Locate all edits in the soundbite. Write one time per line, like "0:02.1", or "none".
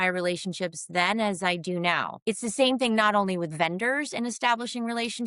0:02.1